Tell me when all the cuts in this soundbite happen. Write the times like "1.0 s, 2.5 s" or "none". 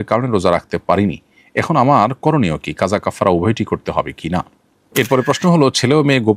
4.8 s

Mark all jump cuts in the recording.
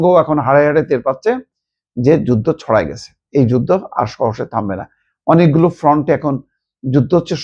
none

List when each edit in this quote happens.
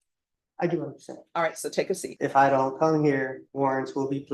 2.1 s, 3.4 s

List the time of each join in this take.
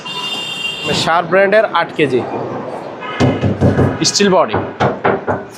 1.0 s

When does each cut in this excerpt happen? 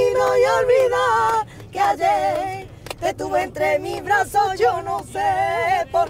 none

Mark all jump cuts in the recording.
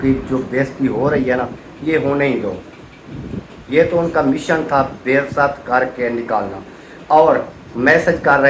none

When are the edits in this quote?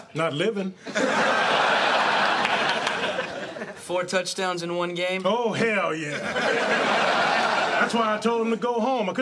none

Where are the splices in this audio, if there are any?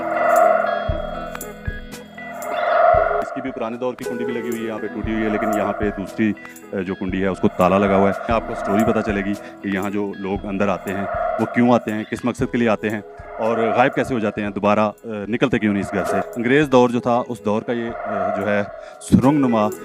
3.2 s, 8.2 s, 16.2 s

